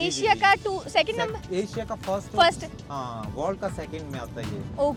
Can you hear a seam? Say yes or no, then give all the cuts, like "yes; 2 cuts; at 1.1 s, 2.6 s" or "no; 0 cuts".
no; 0 cuts